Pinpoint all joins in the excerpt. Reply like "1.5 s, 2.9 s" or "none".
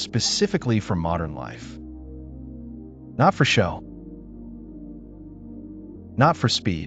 1.5 s, 2.7 s, 3.8 s, 5.8 s